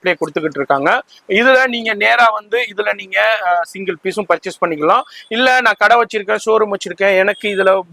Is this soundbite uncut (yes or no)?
yes